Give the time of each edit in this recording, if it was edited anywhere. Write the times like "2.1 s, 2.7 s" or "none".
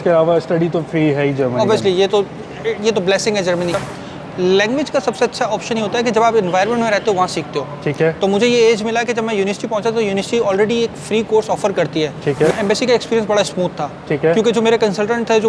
3.9 s, 12.5 s